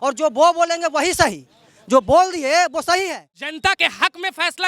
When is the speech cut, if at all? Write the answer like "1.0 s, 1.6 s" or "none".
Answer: 3.4 s